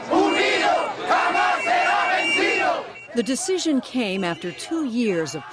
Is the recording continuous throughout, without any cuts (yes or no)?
yes